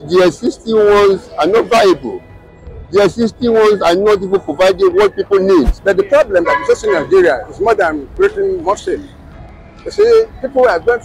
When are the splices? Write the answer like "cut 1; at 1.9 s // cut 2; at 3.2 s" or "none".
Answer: cut 1; at 5.7 s